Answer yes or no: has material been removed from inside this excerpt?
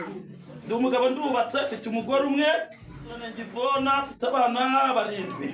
yes